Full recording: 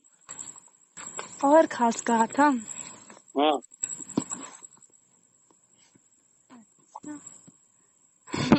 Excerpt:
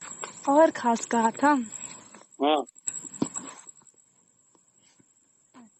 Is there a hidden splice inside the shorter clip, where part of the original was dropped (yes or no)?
no